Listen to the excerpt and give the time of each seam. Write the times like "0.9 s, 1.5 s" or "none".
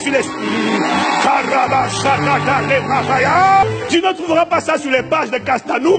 3.6 s